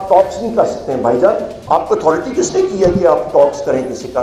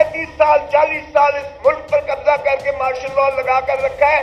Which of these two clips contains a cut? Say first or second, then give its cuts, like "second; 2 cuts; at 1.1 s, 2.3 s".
first; 1 cut; at 1.5 s